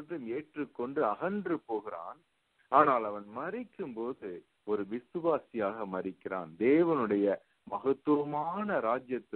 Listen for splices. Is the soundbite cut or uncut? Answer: uncut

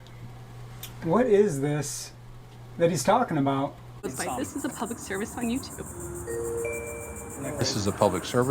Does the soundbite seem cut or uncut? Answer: cut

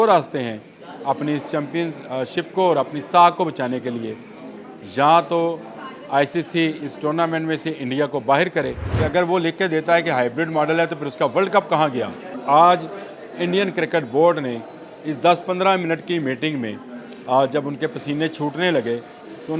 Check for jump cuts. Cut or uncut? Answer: cut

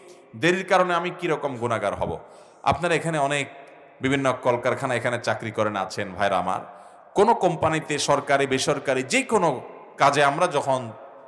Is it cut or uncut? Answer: uncut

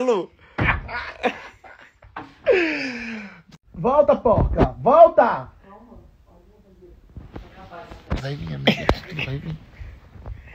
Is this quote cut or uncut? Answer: uncut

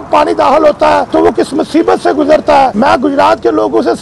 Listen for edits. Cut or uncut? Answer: cut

